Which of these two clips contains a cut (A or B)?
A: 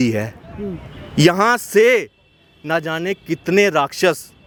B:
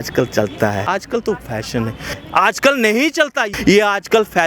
B